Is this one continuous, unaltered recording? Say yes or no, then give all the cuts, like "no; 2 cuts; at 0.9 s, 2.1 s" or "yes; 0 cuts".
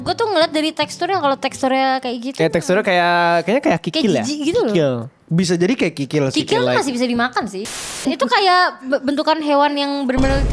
no; 1 cut; at 7.8 s